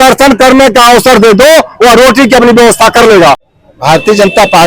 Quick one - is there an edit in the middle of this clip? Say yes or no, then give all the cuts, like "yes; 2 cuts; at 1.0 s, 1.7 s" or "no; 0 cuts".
yes; 1 cut; at 3.5 s